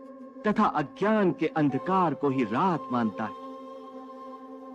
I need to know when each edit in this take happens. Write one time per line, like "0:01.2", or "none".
0:03.6